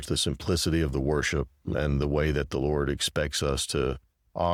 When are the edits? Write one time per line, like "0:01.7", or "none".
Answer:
none